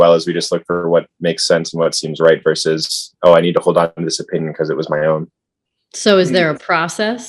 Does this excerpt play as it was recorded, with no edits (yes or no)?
yes